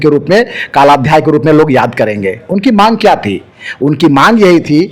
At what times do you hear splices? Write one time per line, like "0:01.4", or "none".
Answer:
none